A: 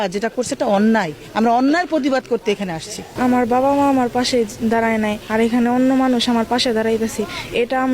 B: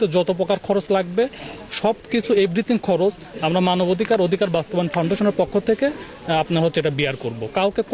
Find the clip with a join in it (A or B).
A